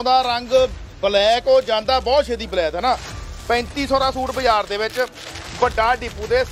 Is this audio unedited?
yes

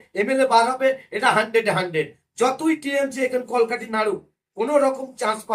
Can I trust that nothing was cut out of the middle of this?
yes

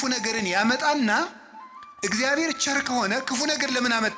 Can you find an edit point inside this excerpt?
no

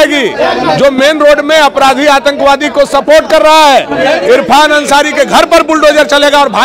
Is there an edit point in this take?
no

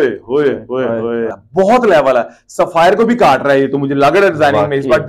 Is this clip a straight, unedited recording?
no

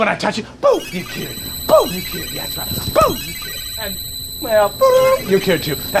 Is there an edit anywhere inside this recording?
no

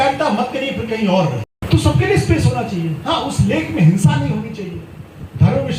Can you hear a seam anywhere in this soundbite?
yes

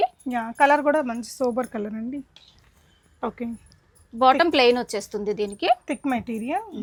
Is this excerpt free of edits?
yes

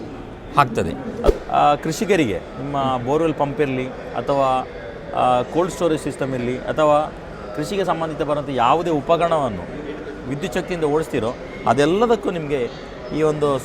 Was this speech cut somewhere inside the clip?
yes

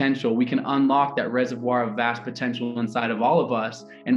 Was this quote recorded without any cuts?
yes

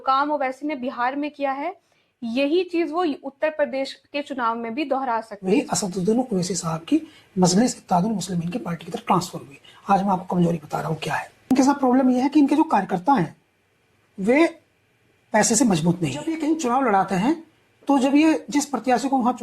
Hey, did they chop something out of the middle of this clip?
yes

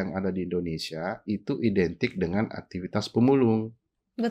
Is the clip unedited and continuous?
yes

